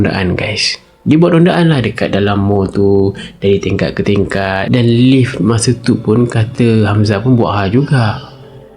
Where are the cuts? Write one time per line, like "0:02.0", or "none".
0:04.6